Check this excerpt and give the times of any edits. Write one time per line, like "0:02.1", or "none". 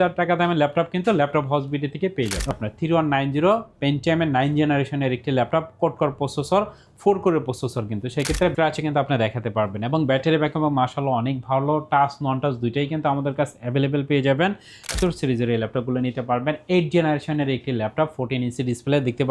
0:02.5
0:08.5
0:14.9